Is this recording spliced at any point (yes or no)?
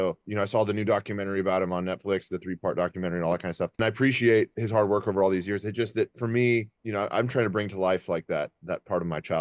yes